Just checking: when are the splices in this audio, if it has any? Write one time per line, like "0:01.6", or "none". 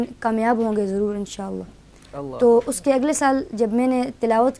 none